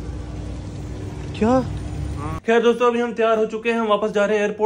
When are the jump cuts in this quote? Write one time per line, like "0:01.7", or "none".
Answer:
0:02.3

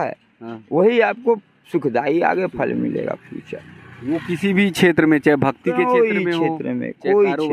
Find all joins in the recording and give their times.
none

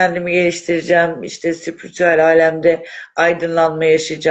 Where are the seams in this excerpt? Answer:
none

